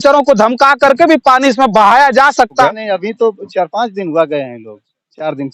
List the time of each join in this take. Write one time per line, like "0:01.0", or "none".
0:02.7

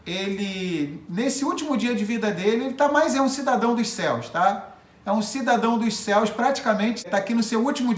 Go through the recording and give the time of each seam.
0:07.1

